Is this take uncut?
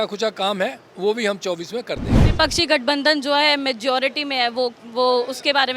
no; 1 cut; at 2.2 s

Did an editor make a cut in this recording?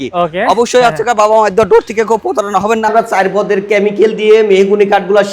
yes; 1 cut; at 2.9 s

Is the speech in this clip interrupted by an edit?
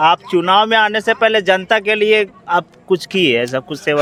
no; 0 cuts

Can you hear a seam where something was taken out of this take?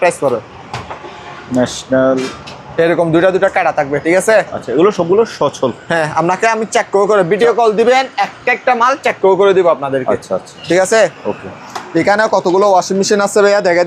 no; 0 cuts

